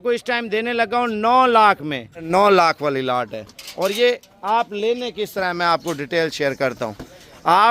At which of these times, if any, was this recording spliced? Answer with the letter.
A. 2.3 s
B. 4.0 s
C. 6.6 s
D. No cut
A